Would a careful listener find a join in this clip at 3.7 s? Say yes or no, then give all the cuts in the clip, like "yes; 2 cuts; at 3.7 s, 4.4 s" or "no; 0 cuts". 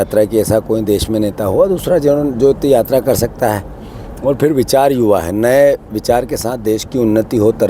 no; 0 cuts